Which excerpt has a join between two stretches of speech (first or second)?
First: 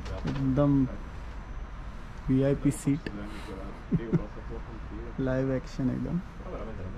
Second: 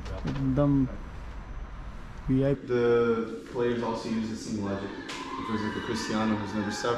second